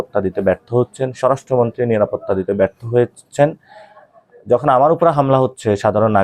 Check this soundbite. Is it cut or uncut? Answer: uncut